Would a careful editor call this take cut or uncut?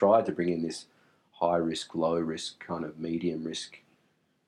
uncut